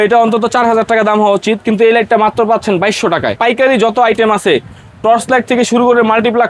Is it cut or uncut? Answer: cut